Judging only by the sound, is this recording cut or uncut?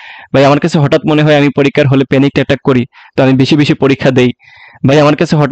uncut